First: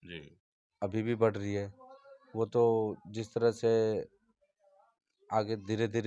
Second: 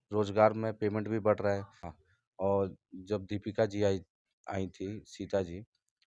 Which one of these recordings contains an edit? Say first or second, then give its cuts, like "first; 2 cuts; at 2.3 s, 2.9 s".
second; 1 cut; at 1.9 s